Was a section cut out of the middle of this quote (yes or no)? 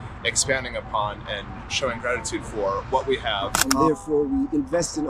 yes